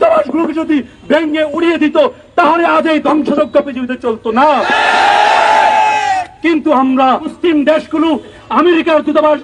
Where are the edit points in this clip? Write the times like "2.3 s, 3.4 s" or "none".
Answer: 7.3 s, 8.4 s